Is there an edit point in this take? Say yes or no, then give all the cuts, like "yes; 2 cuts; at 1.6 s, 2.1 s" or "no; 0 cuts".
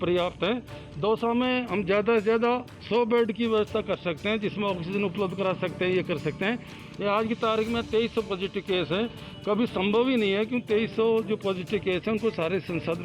no; 0 cuts